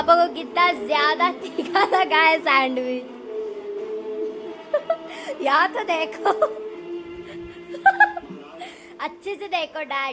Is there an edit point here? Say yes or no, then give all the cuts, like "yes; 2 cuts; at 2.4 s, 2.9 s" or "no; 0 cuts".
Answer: no; 0 cuts